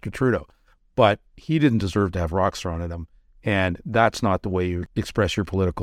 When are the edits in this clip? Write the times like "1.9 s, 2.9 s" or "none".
4.8 s